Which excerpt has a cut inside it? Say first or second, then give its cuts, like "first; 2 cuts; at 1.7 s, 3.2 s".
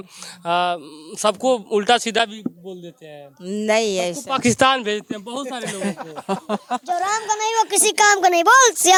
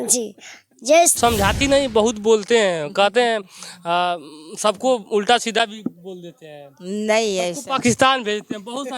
second; 1 cut; at 1.2 s